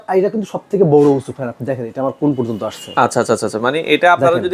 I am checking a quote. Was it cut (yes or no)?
no